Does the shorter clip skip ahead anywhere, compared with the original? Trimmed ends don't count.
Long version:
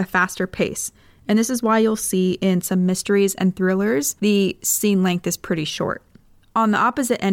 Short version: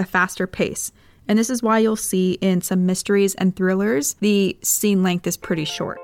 no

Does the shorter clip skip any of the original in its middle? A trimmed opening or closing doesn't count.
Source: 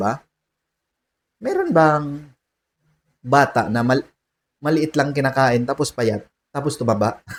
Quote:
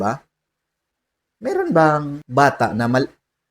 yes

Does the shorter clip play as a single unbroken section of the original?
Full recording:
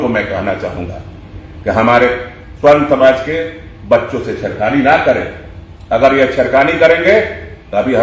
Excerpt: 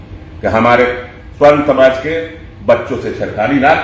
yes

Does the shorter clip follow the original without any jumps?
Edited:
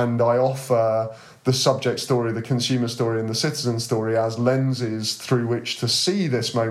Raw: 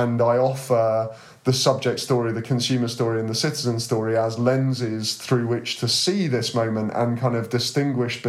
yes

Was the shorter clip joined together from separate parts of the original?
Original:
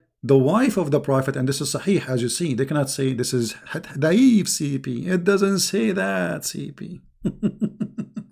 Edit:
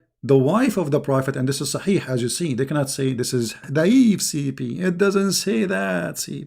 yes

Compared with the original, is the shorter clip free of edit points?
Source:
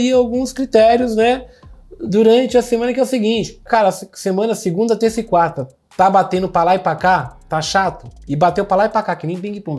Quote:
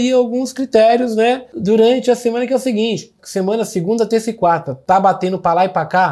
no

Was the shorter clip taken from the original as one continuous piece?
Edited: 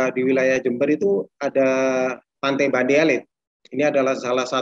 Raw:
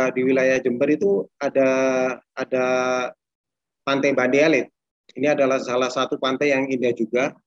no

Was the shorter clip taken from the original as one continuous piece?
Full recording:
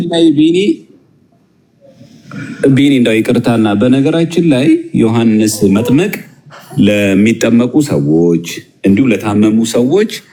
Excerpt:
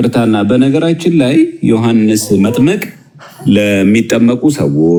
yes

